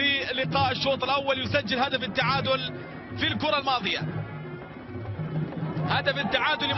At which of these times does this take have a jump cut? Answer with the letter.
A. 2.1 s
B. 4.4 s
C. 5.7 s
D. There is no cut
D